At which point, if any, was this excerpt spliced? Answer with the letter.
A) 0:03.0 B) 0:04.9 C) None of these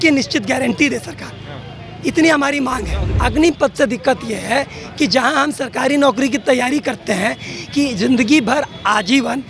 A